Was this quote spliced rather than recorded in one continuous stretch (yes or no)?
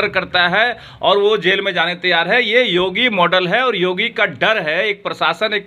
no